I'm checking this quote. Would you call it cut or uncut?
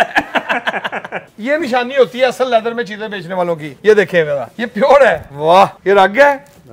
cut